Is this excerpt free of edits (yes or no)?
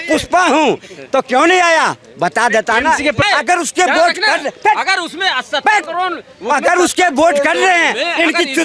no